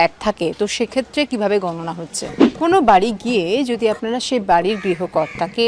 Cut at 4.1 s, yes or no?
no